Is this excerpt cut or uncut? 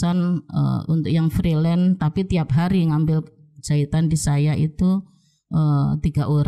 uncut